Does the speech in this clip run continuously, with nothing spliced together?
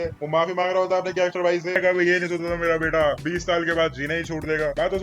no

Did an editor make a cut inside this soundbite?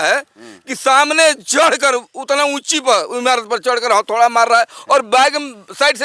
no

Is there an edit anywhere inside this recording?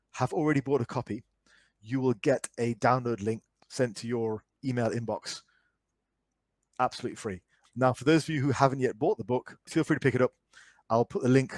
yes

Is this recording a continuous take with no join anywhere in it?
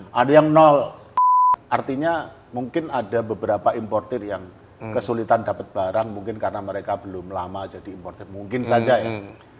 no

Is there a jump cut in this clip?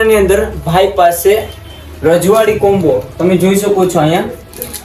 no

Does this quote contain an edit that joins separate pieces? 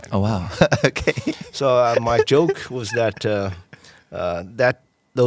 no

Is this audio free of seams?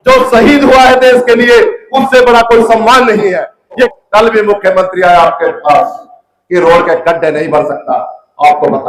no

